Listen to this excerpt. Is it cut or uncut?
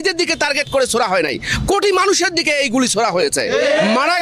uncut